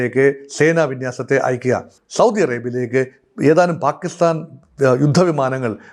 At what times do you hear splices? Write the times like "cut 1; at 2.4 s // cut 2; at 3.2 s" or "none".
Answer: cut 1; at 2.0 s

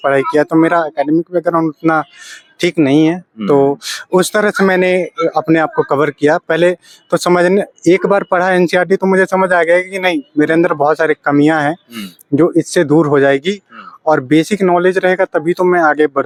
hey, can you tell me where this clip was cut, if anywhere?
none

